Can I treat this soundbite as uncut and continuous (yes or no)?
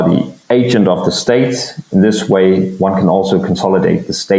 yes